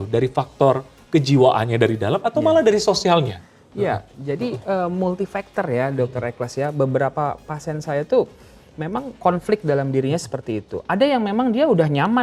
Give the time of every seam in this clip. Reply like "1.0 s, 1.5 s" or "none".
none